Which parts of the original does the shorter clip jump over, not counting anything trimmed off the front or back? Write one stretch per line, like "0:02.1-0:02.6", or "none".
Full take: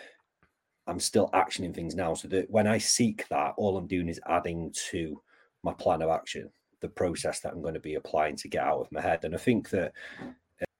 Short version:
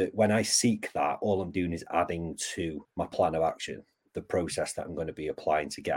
0:05.2-0:05.5